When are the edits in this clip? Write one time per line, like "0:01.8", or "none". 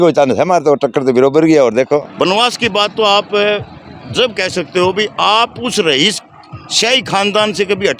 0:02.1